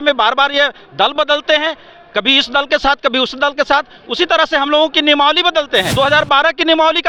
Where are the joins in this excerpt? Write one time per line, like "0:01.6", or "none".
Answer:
0:05.9